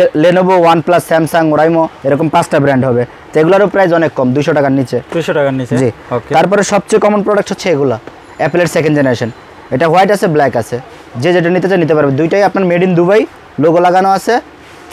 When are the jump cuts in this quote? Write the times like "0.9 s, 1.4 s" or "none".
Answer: none